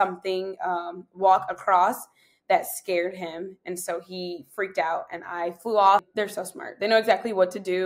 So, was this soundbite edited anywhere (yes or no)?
yes